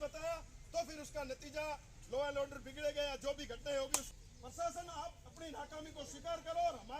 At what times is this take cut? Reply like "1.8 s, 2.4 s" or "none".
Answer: 4.1 s

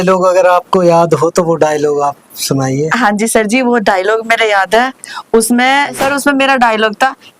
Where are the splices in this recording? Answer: 6.0 s

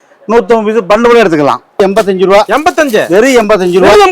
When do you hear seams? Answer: 1.8 s

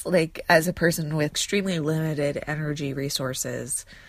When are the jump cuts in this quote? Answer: 1.4 s

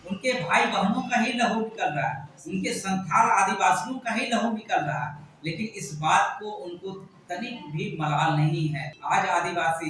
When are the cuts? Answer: 8.9 s

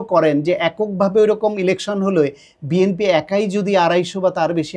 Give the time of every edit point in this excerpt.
none

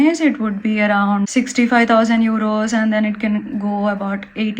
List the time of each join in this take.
1.3 s

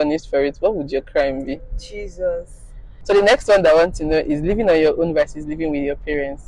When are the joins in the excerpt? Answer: 3.0 s

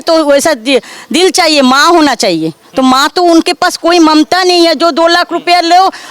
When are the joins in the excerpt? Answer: none

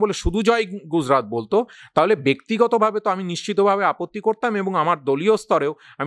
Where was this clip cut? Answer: none

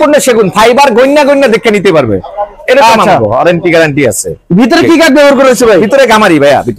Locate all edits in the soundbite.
none

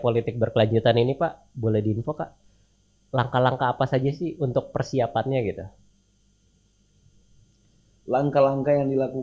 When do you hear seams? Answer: 6.9 s

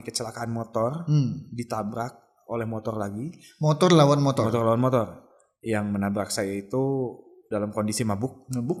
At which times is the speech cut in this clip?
none

